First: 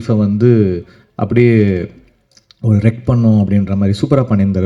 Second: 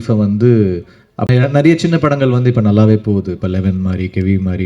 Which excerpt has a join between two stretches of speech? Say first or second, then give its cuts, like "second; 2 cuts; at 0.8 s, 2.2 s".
second; 1 cut; at 1.3 s